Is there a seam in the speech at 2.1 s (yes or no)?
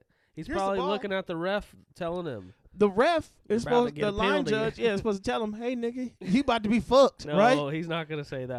no